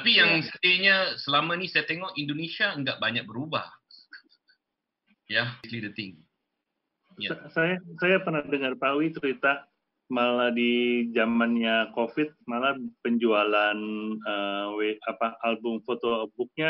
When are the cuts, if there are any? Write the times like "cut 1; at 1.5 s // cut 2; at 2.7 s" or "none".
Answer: cut 1; at 5.7 s